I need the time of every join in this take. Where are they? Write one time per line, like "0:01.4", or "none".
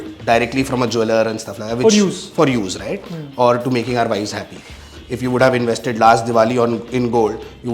0:04.9